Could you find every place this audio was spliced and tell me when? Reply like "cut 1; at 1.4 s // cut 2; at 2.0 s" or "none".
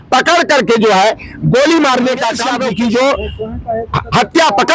cut 1; at 2.4 s